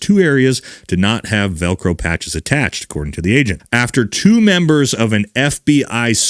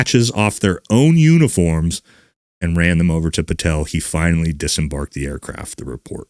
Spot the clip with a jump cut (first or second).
first